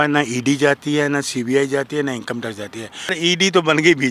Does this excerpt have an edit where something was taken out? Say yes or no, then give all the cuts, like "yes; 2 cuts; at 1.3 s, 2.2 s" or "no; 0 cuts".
yes; 1 cut; at 3.2 s